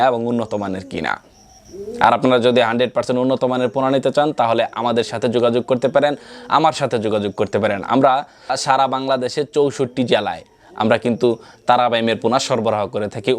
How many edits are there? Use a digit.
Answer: 0